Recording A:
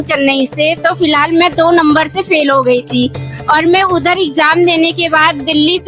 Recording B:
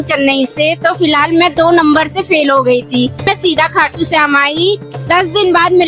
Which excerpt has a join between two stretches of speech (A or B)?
B